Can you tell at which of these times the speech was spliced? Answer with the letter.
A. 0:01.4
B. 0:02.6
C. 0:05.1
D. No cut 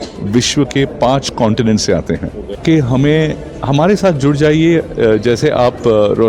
B